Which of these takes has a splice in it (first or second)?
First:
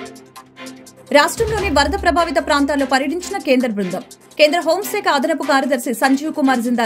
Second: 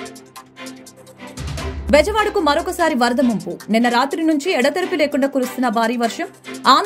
second